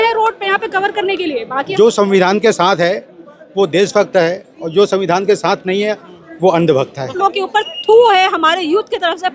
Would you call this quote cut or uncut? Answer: cut